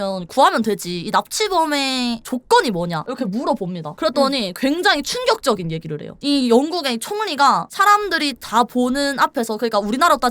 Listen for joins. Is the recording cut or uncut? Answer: uncut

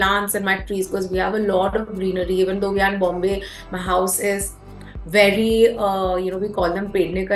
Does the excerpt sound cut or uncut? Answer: uncut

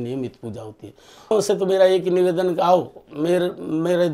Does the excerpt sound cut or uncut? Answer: cut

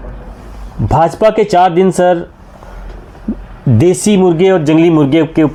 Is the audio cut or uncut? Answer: uncut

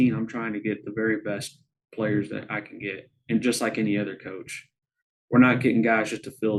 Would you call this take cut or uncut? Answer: uncut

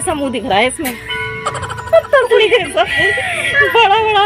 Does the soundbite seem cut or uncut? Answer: uncut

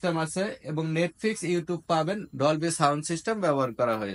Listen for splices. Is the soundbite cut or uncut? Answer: uncut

